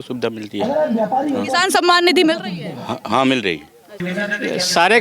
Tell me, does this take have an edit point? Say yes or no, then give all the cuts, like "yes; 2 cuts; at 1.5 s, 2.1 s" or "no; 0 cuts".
yes; 1 cut; at 3.9 s